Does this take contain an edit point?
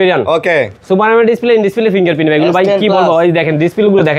no; 0 cuts

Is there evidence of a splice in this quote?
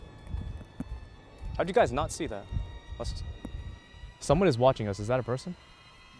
yes; 1 cut; at 3.6 s

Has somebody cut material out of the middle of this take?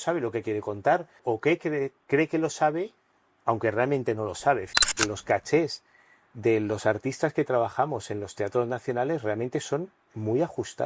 yes; 2 cuts; at 1.2 s, 4.9 s

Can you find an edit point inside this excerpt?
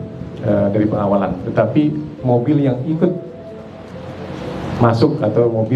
no; 0 cuts

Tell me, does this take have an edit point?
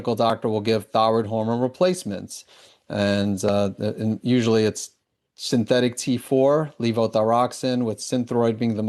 no; 0 cuts

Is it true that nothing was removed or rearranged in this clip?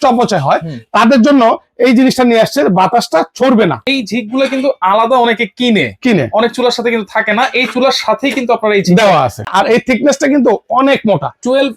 no; 2 cuts; at 3.8 s, 9.5 s

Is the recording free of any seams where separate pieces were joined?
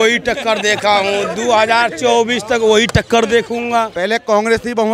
no; 1 cut; at 3.9 s

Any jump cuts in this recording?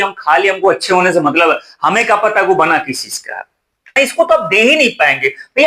yes; 1 cut; at 3.9 s

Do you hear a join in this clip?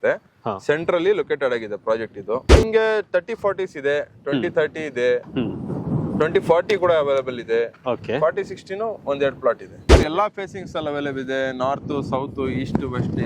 yes; 2 cuts; at 2.6 s, 9.9 s

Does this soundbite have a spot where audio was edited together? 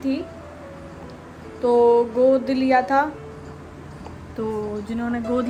no; 0 cuts

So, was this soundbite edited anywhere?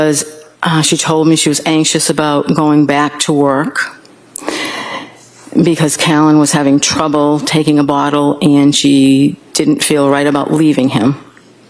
no; 0 cuts

